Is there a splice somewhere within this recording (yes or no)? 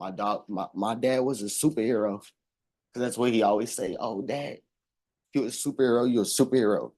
no